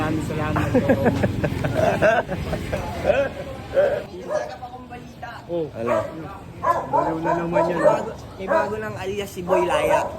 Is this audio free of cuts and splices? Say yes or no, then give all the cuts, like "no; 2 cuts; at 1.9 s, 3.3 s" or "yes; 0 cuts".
no; 1 cut; at 4.0 s